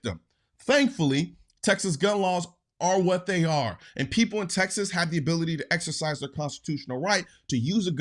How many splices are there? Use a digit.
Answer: 0